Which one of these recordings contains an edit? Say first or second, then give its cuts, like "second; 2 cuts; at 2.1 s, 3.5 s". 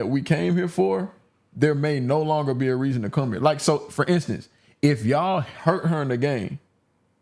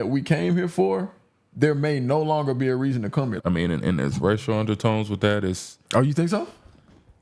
second; 1 cut; at 3.3 s